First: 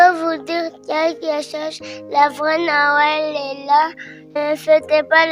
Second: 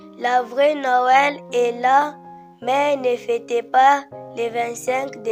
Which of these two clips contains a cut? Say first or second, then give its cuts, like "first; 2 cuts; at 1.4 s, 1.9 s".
first; 1 cut; at 4.4 s